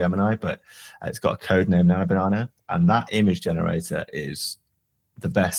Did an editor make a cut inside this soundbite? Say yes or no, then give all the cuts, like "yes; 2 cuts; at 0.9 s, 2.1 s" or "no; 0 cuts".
no; 0 cuts